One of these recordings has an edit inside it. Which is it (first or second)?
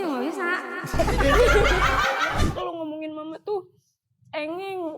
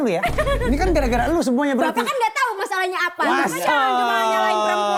first